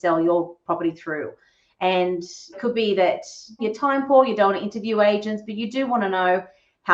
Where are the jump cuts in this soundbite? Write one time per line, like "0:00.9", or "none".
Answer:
0:02.6
0:03.6